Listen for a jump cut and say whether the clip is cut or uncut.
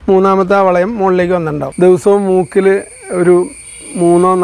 cut